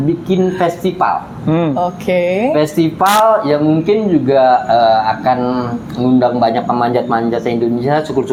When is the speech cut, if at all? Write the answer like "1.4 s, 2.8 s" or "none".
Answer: none